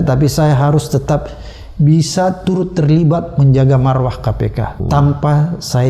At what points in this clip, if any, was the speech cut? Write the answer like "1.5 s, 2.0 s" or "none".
4.8 s